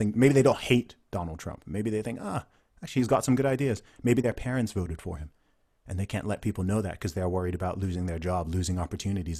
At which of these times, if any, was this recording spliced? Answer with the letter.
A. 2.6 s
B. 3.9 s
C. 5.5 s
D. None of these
D